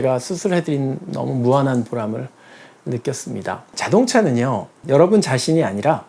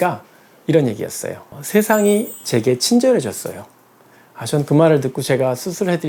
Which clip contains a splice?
first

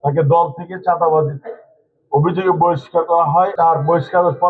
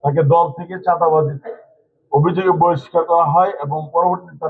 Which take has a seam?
first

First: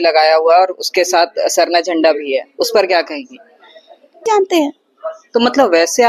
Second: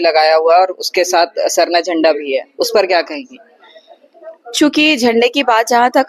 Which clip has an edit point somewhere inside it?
first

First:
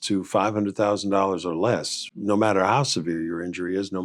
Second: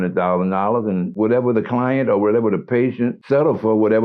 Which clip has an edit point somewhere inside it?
second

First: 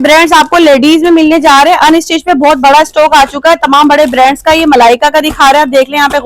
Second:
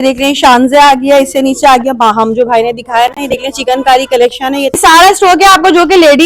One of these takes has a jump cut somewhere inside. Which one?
second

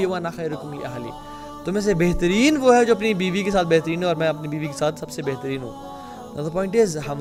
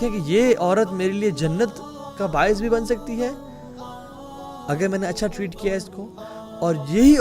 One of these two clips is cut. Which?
second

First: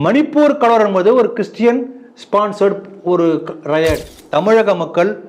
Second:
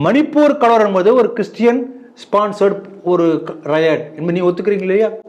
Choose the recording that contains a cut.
first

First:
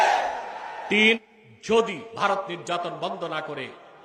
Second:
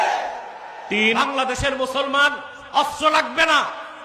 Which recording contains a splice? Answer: second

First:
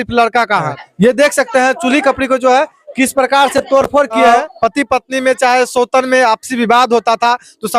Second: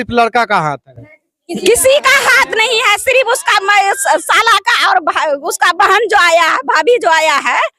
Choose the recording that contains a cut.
first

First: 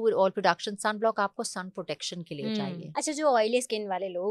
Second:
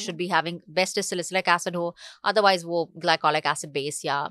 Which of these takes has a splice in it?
first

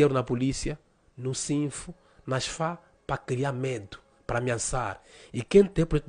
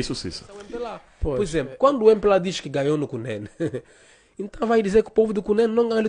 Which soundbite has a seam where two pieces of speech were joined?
second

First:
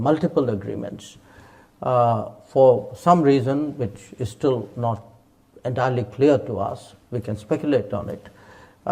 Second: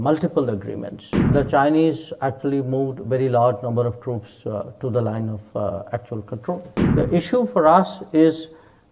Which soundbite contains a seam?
second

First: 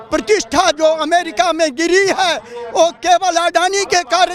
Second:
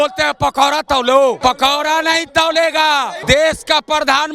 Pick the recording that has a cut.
second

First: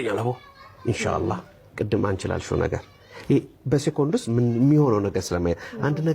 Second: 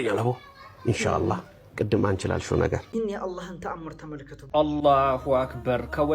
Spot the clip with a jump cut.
second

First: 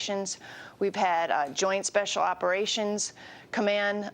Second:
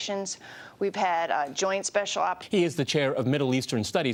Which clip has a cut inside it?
first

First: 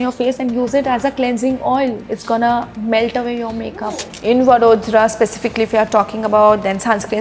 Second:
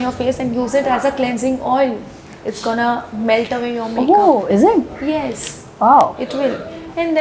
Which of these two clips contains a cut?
first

